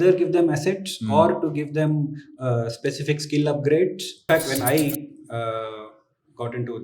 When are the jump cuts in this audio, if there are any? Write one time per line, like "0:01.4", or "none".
0:04.2